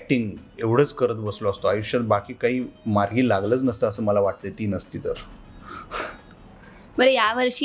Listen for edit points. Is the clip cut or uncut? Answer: uncut